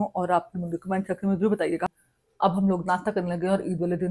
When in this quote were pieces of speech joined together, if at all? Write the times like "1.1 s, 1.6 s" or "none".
1.9 s